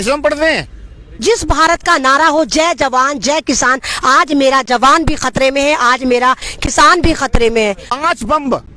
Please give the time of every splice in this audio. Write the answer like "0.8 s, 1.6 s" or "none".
1.2 s, 7.8 s